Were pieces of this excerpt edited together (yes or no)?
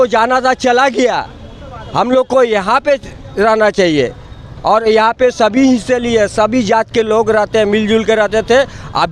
no